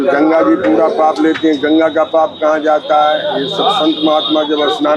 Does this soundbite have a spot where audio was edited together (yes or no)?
no